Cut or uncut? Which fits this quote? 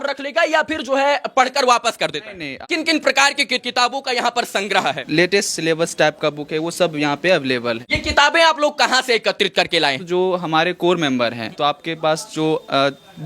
cut